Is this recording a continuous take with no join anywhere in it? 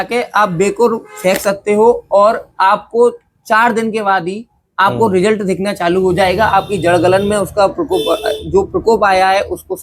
yes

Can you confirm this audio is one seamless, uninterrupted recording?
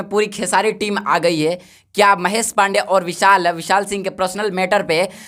yes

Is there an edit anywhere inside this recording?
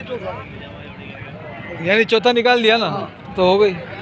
no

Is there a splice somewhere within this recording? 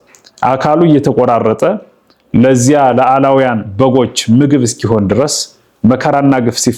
no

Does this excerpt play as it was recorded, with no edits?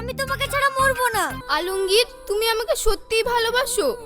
no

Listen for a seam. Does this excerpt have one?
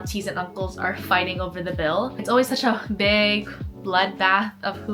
no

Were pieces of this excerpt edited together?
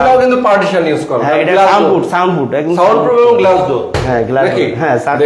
no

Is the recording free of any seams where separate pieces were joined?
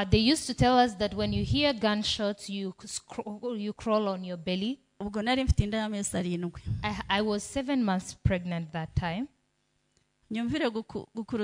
yes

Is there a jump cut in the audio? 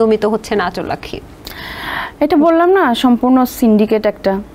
no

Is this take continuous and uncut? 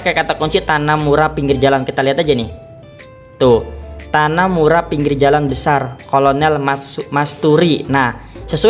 yes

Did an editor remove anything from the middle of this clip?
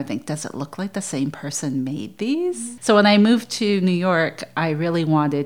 no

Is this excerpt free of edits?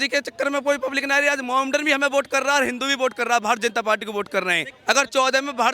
no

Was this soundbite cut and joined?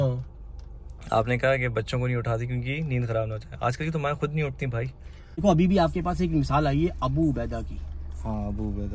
yes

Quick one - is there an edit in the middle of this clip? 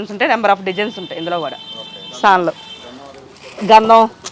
no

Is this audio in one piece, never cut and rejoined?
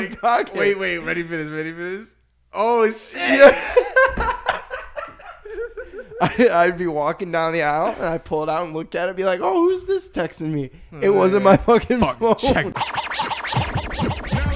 no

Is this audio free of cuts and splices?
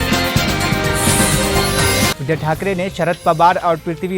no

